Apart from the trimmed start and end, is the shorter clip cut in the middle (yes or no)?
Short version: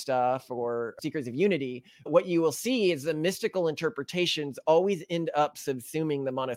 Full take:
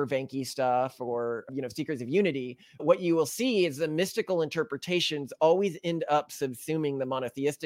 yes